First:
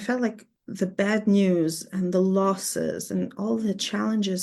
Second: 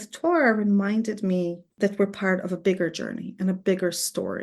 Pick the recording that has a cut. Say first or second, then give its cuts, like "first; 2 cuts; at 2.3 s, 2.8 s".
second; 1 cut; at 1.6 s